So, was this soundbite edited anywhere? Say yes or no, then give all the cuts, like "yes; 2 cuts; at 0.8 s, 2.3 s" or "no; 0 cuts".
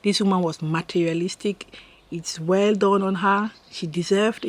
no; 0 cuts